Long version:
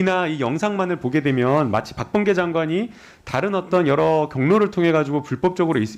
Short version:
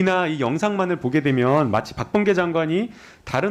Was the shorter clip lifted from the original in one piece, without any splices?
yes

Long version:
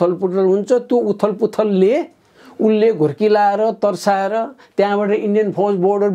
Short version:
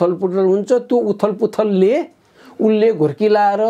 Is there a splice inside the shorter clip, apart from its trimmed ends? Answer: no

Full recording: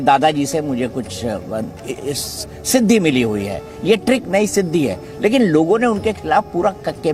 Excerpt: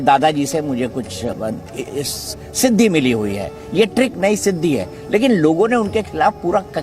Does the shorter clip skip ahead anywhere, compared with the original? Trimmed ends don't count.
yes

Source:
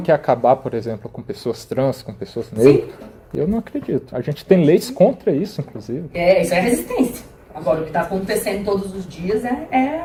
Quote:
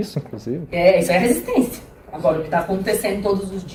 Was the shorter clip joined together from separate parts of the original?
no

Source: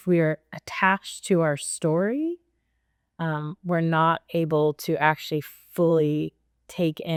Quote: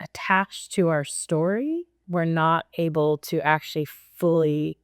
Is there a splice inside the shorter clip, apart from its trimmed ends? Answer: yes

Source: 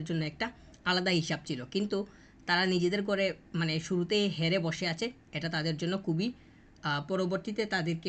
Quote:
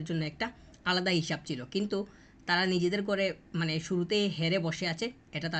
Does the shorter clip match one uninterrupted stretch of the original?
yes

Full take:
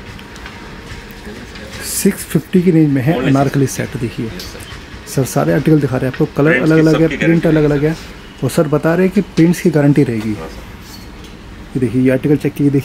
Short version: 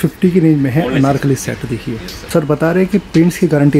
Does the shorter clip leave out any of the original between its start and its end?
yes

